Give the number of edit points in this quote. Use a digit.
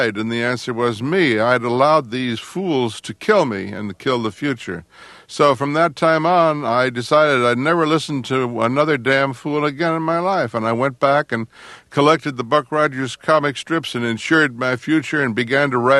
0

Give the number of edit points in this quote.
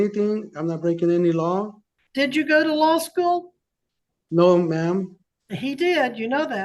1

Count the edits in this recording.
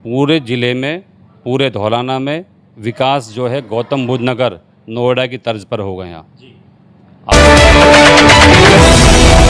1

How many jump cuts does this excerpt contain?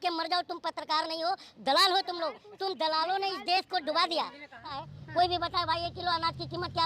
1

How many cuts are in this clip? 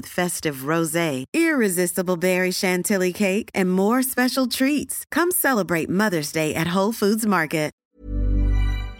1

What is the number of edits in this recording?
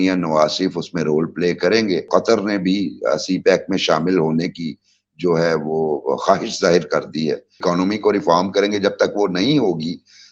2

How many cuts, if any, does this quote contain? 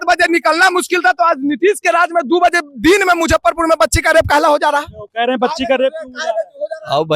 0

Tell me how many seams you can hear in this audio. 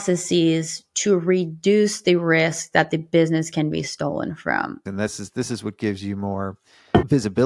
1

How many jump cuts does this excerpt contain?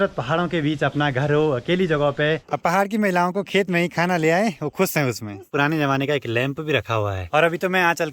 3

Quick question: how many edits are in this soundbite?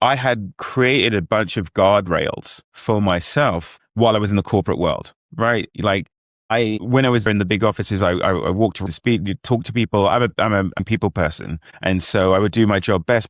0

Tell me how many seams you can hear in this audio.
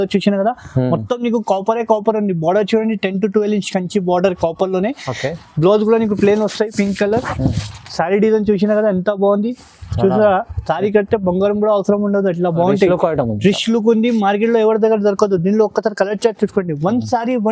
0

